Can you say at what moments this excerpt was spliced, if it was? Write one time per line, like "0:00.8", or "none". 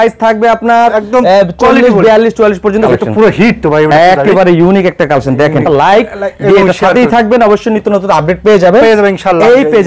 0:02.9
0:05.6